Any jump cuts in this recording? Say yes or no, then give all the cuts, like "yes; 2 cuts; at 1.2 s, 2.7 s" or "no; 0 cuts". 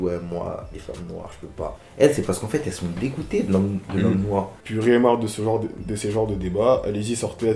yes; 2 cuts; at 1.8 s, 4.6 s